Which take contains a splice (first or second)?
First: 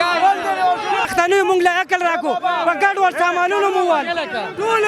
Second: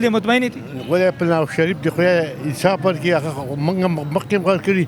first